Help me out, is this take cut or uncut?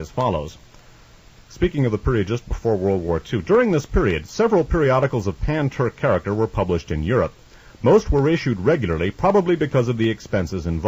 uncut